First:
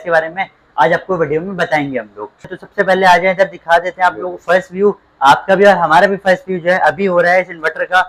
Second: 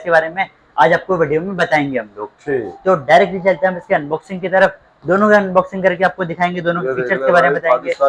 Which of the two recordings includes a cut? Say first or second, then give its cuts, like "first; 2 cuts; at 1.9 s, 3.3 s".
first; 1 cut; at 2.6 s